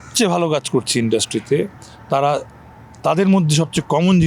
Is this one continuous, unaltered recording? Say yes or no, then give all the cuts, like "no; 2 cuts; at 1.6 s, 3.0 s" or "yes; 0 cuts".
yes; 0 cuts